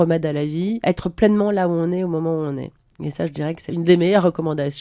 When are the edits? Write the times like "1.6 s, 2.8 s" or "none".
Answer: 0.8 s, 3.7 s